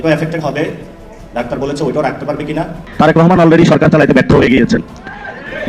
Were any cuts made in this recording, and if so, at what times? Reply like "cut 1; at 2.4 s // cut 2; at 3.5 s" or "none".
cut 1; at 2.8 s